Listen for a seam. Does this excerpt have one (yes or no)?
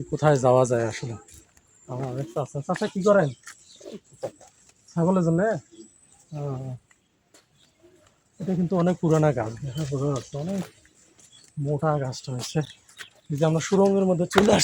no